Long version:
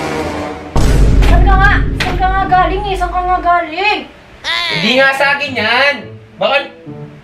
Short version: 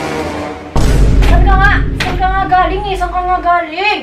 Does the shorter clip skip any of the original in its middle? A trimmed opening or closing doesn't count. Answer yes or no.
no